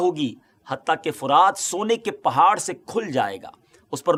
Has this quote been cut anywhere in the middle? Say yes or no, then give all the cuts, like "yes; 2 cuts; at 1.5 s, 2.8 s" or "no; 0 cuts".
no; 0 cuts